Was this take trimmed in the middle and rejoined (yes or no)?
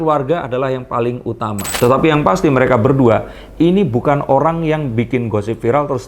yes